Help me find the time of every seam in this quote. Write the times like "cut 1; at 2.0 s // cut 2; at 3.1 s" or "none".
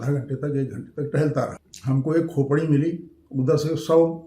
cut 1; at 1.7 s